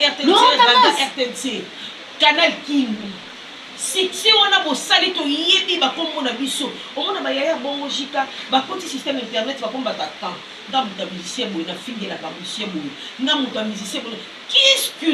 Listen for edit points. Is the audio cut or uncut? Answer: uncut